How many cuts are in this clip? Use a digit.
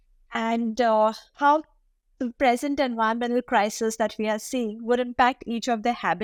0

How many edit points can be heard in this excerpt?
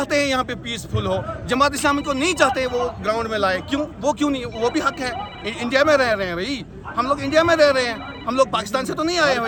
0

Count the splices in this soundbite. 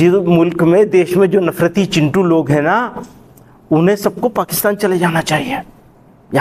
0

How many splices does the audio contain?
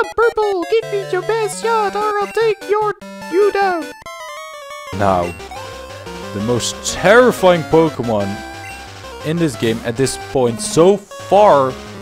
1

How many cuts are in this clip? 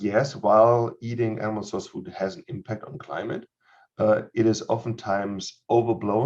0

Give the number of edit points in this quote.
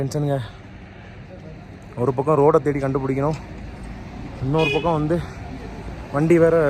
0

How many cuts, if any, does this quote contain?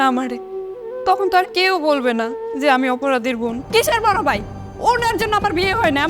1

